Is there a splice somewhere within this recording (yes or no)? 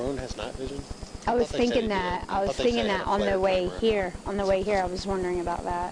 no